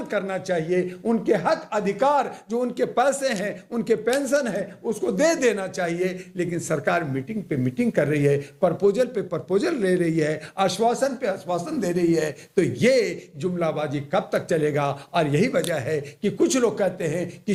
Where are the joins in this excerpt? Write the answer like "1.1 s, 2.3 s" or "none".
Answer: none